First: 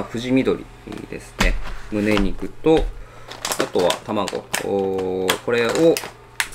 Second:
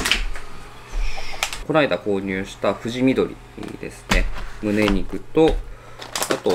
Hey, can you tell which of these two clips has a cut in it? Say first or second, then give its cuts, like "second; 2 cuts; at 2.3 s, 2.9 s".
second; 1 cut; at 1.6 s